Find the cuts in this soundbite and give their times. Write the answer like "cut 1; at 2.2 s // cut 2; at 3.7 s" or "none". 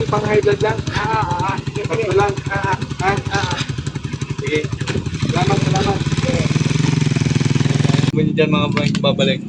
cut 1; at 8.1 s

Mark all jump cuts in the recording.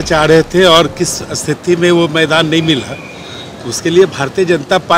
none

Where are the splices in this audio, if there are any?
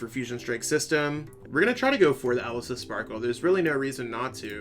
cut 1; at 1.3 s

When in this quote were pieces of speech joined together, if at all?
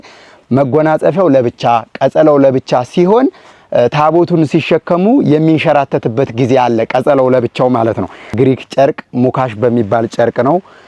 cut 1; at 8.3 s

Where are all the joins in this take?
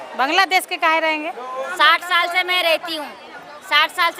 cut 1; at 1.6 s

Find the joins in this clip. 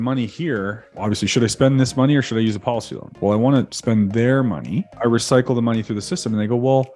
cut 1; at 0.9 s // cut 2; at 3.1 s // cut 3; at 3.7 s // cut 4; at 4.9 s

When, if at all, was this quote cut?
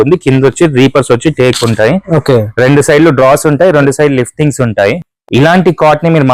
cut 1; at 5.0 s

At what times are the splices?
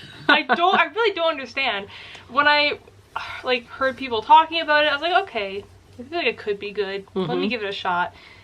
none

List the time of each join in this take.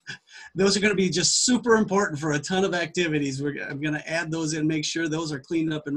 none

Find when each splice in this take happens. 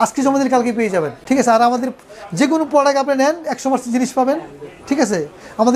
cut 1; at 1.2 s

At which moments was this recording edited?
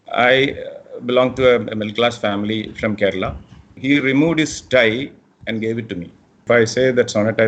cut 1; at 3.8 s // cut 2; at 6.4 s

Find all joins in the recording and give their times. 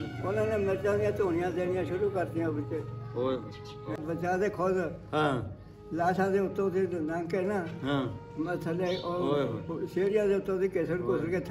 cut 1; at 4.0 s

